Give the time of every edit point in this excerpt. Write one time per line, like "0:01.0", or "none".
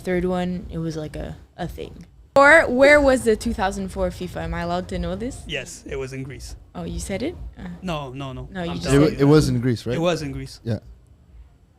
0:02.4